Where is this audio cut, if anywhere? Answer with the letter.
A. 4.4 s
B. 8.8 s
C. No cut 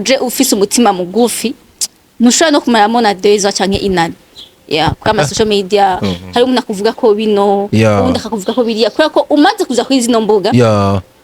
C